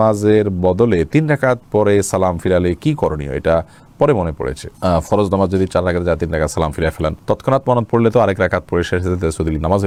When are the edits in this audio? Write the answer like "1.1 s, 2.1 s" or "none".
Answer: none